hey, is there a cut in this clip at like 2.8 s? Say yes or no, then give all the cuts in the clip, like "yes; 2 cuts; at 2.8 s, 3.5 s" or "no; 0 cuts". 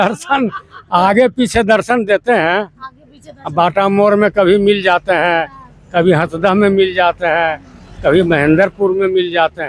no; 0 cuts